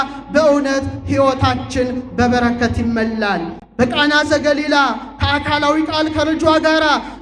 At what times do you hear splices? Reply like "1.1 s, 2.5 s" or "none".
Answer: none